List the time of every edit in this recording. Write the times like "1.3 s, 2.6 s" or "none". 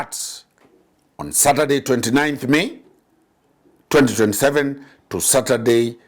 none